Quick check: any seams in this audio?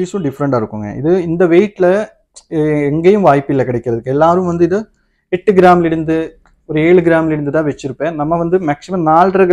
no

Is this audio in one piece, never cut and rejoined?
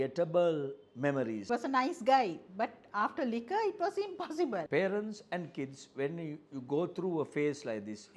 no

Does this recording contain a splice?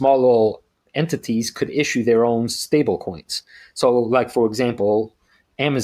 no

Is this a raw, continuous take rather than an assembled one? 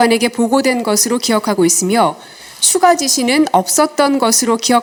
yes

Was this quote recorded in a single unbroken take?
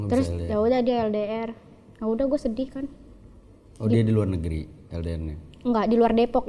yes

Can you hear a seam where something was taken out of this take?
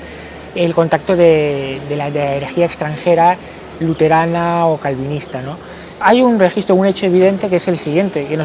yes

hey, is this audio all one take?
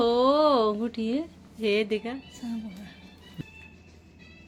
yes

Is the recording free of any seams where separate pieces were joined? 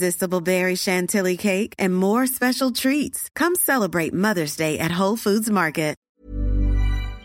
no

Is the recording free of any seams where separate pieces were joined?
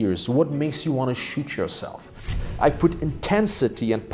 no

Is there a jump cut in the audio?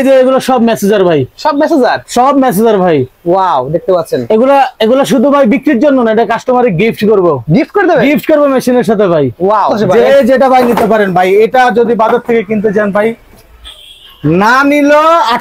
yes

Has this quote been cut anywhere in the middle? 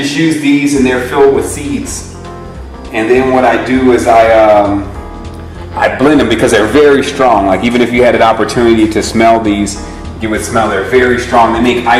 no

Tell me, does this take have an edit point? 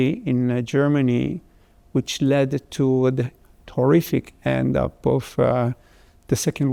no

